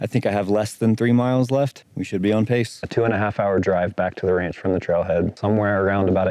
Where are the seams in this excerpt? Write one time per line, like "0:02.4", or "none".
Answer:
0:01.8
0:02.8
0:05.4